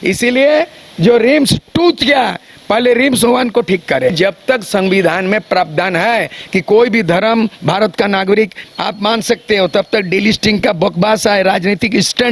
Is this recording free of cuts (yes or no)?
no